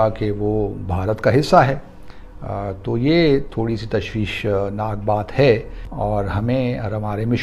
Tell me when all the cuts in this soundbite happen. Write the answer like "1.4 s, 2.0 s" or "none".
5.8 s